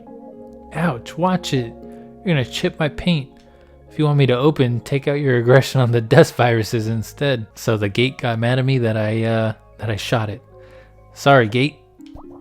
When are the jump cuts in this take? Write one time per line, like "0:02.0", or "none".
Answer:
0:07.5